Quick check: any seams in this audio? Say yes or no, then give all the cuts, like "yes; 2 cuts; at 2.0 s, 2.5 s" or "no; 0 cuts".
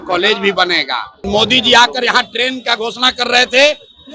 yes; 1 cut; at 1.1 s